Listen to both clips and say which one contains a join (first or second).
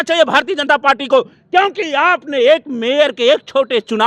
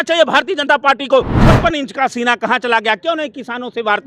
second